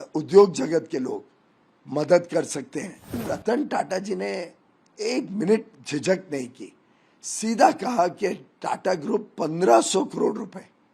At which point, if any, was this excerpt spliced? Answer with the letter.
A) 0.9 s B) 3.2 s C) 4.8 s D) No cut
B